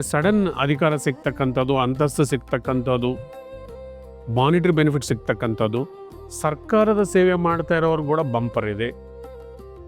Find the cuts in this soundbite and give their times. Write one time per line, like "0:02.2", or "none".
none